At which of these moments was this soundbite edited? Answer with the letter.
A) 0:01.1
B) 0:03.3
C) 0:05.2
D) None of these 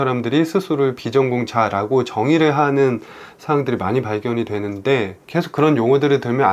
C